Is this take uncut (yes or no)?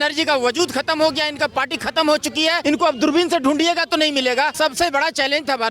no